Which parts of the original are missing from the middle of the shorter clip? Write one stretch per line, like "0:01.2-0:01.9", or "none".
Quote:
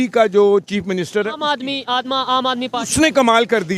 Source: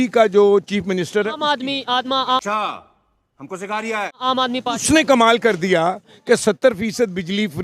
0:02.3-0:04.3